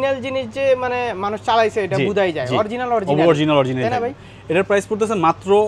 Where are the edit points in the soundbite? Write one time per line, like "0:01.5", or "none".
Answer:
none